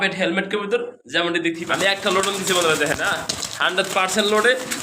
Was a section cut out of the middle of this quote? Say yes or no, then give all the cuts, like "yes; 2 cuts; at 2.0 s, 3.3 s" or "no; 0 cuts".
yes; 1 cut; at 1.6 s